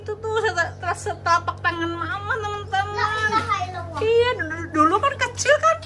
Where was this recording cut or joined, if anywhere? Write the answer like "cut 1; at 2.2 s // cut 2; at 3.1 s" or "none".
none